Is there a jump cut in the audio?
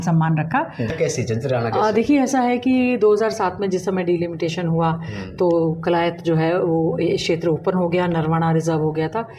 yes; 1 cut; at 0.9 s

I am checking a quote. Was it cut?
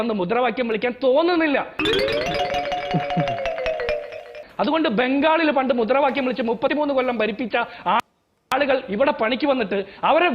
no; 0 cuts

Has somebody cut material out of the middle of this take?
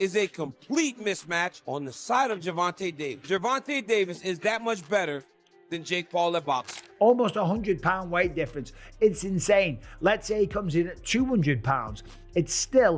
yes; 1 cut; at 6.7 s

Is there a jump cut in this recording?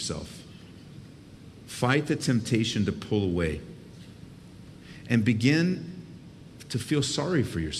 yes; 1 cut; at 1.0 s

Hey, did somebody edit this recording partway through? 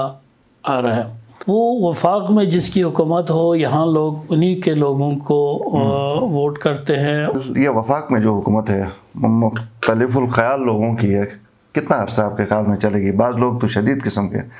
yes; 2 cuts; at 1.2 s, 7.3 s

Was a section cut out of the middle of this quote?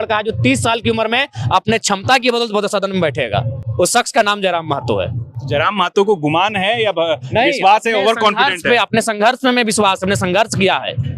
no; 0 cuts

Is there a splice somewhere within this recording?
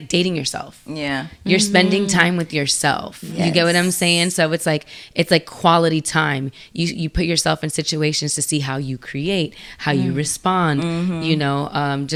no; 0 cuts

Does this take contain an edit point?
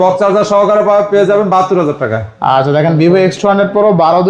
no; 0 cuts

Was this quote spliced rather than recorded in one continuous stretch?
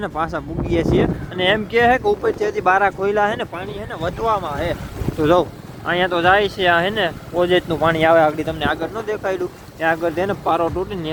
no; 0 cuts

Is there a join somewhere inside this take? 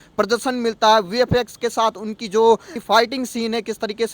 yes; 1 cut; at 2.7 s

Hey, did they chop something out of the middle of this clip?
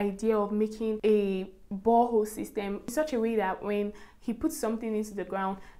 yes; 2 cuts; at 1.0 s, 2.9 s

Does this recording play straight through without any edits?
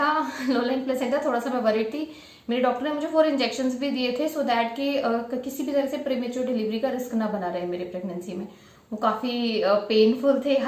yes; 0 cuts

